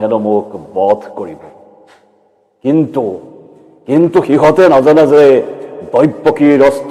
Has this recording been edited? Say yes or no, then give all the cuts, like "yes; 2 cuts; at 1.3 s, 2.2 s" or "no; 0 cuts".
no; 0 cuts